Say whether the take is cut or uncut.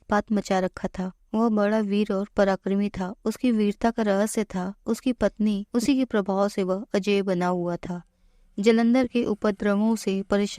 cut